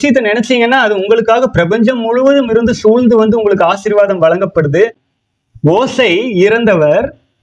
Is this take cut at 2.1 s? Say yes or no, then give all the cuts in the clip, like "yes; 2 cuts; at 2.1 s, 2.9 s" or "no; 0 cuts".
no; 1 cut; at 5.1 s